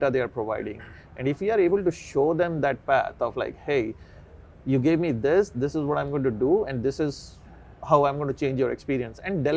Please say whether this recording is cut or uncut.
uncut